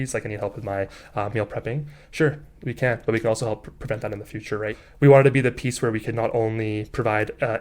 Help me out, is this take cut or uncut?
cut